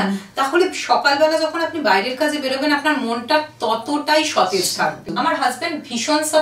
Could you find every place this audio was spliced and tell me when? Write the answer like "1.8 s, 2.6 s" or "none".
5.0 s